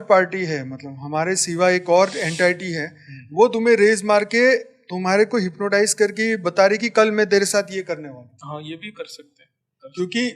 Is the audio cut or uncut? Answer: uncut